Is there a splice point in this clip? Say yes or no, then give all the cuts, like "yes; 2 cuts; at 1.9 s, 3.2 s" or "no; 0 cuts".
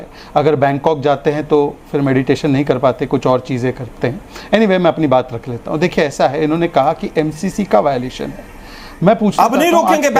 no; 0 cuts